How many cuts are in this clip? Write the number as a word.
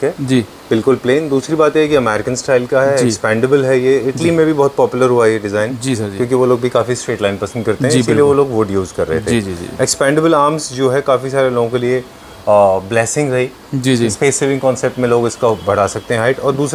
zero